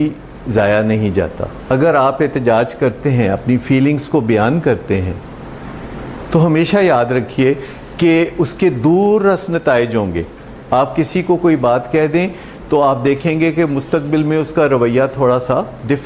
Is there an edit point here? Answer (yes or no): no